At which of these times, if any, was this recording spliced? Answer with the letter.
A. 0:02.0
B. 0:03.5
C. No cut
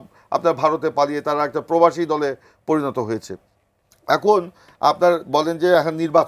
C